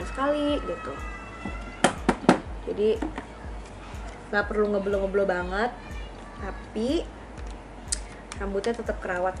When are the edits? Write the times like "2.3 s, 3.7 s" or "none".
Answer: none